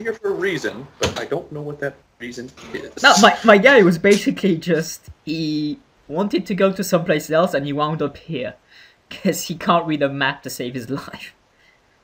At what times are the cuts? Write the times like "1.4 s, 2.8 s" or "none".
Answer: 7.6 s